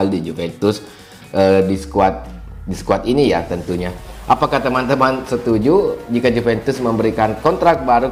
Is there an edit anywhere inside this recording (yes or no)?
no